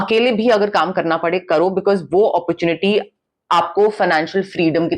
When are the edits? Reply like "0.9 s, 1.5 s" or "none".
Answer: none